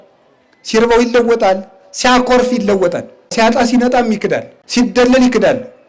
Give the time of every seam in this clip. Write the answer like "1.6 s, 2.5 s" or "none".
3.3 s, 4.6 s